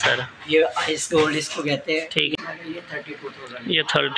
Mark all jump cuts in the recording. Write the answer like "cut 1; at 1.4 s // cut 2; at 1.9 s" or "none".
cut 1; at 2.3 s